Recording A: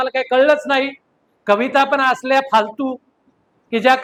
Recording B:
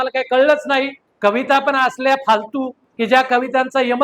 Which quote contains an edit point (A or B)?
B